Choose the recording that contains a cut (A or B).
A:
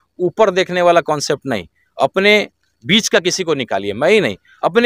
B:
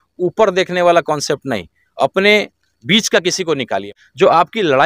B